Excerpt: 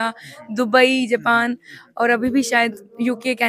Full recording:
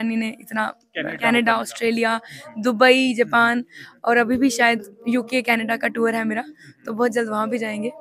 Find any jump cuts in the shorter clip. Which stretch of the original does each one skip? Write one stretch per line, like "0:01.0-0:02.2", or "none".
none

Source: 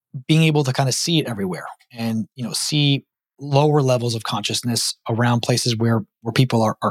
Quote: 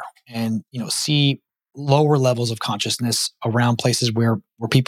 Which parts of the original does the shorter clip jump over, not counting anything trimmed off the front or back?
none

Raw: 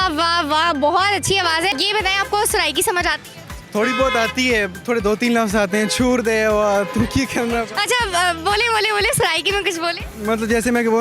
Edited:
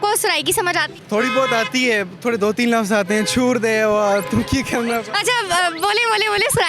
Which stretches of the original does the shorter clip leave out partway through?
0:03.2-0:03.6

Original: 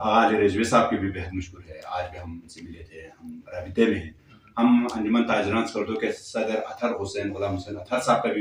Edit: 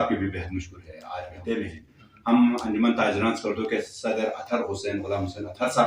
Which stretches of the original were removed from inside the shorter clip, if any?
0:02.1-0:03.6

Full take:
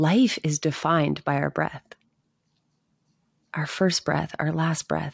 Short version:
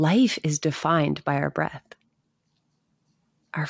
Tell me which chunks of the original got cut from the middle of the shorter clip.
none

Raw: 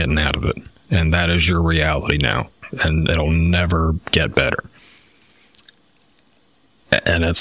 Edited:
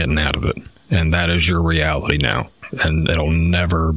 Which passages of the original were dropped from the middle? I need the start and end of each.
none

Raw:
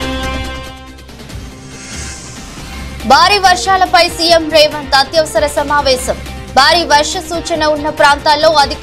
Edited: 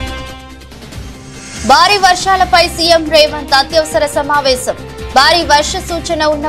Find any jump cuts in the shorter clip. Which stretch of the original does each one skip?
0:01.9-0:03.0

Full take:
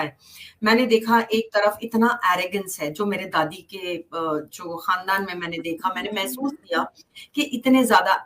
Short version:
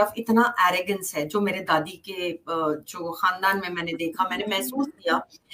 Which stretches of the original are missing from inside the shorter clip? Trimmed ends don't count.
none

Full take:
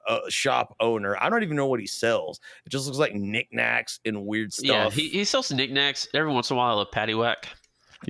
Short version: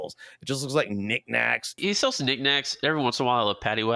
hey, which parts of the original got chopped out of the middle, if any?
0:04.0-0:05.1

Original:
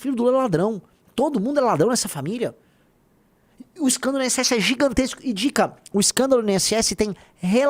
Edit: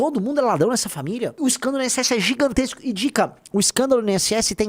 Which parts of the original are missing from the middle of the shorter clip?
0:02.5-0:03.7

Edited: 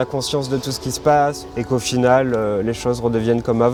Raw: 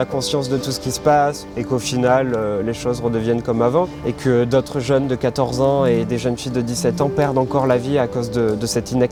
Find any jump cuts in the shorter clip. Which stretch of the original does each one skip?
none

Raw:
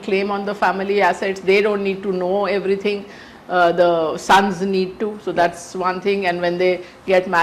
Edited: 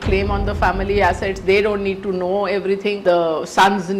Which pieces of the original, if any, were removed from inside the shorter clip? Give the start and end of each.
0:03.0-0:03.7

